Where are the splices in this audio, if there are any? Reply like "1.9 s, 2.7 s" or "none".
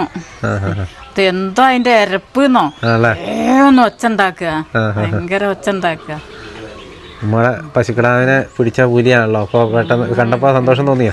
none